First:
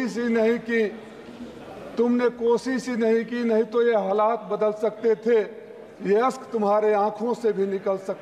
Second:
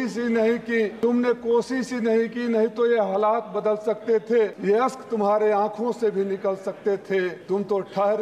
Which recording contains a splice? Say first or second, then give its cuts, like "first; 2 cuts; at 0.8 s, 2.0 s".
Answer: second; 3 cuts; at 0.9 s, 4.6 s, 7.4 s